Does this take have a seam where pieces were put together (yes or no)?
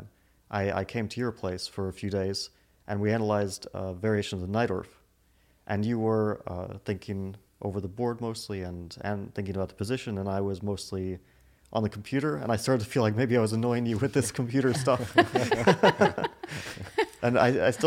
no